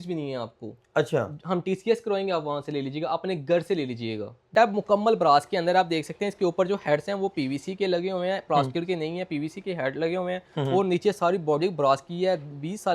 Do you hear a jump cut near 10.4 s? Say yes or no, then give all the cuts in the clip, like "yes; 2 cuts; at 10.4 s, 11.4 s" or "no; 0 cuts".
no; 1 cut; at 4.5 s